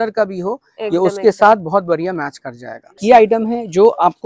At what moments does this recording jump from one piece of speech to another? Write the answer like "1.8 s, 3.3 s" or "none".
3.0 s

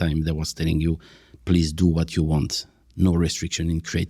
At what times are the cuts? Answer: none

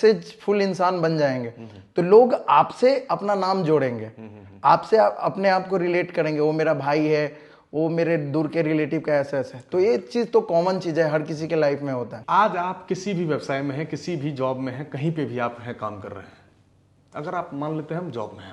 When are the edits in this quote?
12.2 s

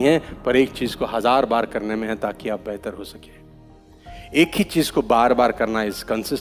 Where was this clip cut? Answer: none

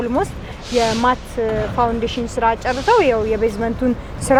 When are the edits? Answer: none

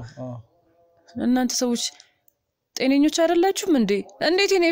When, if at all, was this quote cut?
none

